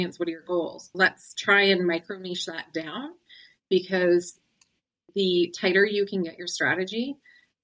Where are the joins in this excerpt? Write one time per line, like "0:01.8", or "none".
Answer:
0:00.9

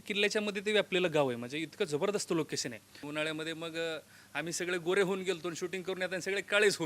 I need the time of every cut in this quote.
0:03.0

